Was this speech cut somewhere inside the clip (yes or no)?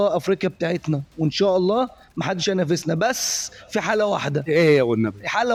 no